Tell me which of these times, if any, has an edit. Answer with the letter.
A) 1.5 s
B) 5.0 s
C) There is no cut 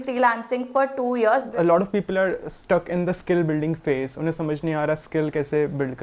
A